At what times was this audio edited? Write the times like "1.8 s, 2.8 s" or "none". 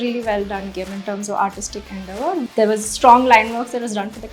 2.4 s